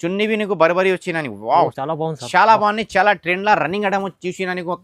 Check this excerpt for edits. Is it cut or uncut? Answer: cut